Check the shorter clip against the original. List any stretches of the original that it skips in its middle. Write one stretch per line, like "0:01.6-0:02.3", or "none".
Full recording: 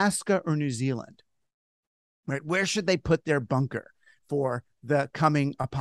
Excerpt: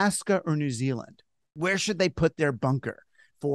0:01.5-0:02.4